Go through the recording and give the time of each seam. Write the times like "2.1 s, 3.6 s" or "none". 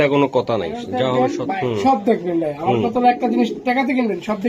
1.4 s